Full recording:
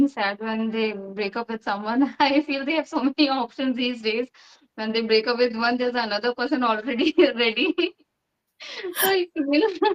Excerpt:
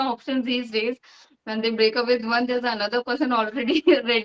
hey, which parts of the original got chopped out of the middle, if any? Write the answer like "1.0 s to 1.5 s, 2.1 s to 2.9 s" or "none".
none